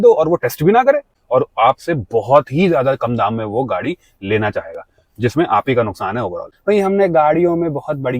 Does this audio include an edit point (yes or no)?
yes